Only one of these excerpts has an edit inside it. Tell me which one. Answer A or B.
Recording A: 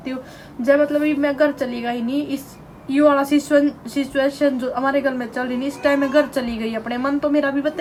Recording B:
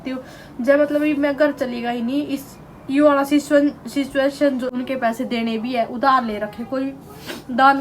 B